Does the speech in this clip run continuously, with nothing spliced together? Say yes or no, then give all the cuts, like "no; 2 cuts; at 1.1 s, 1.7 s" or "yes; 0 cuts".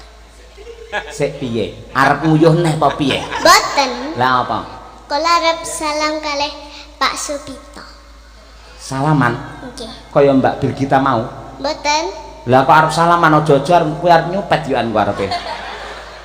yes; 0 cuts